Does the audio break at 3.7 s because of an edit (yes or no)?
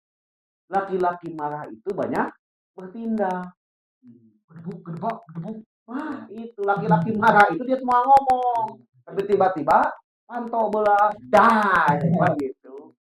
no